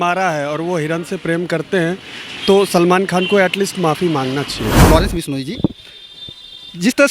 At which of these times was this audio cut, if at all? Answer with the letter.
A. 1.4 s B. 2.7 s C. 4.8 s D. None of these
C